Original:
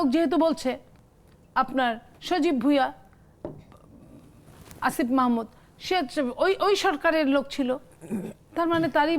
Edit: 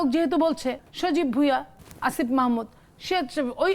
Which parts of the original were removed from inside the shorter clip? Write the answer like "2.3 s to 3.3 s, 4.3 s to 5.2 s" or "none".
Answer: 0.9 s to 2.1 s, 3.1 s to 4.6 s